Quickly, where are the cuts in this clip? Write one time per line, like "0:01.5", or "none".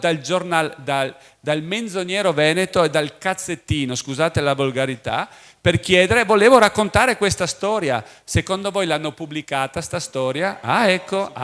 none